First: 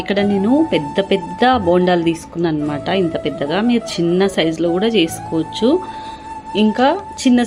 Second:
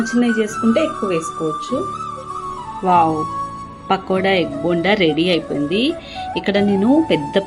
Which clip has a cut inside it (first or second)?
second